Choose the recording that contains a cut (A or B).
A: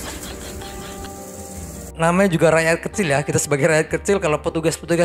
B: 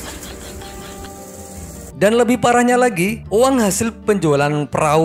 B